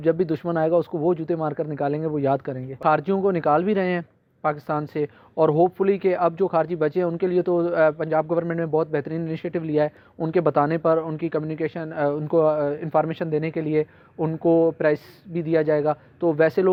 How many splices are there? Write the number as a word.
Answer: zero